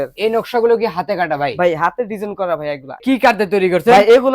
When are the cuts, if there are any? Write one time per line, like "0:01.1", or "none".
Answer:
0:03.0